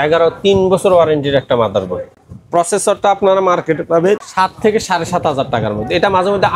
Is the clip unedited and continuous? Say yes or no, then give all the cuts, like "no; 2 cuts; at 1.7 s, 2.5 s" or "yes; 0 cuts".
yes; 0 cuts